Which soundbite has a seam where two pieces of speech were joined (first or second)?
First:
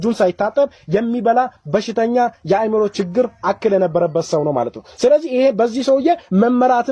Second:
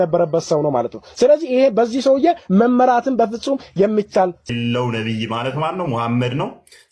second